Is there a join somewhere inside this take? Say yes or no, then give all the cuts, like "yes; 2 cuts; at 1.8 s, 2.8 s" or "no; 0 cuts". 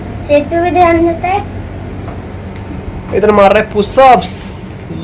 no; 0 cuts